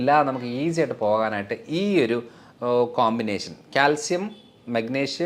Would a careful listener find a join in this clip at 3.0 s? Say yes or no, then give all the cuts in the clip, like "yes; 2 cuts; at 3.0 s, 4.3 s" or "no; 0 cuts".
no; 0 cuts